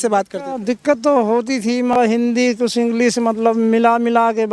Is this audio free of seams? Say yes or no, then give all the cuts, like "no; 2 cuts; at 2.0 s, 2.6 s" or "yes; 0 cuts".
no; 1 cut; at 1.9 s